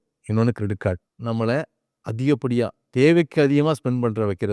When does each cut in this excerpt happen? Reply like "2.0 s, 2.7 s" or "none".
1.1 s